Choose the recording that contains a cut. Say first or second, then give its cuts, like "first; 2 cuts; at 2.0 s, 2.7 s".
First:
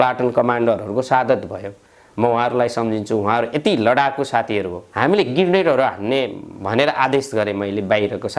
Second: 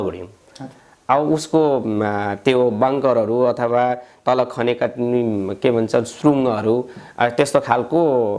first; 1 cut; at 4.8 s